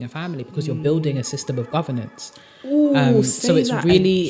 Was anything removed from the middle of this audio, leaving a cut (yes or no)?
no